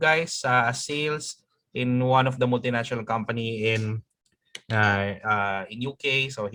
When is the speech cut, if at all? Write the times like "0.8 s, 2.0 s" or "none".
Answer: none